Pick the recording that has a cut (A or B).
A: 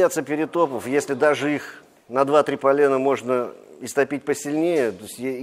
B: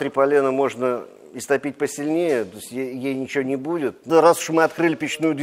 B